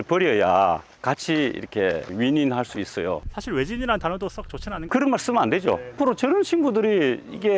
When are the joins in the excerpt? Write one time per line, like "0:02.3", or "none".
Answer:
0:04.9
0:05.9